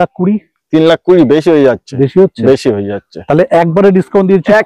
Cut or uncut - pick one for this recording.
uncut